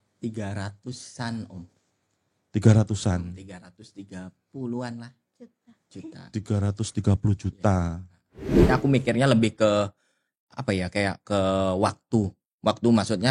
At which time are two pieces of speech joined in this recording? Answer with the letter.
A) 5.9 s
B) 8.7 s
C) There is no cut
B